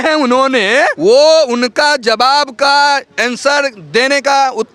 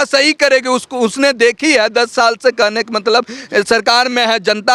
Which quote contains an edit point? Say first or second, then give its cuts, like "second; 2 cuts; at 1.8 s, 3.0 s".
first; 1 cut; at 0.9 s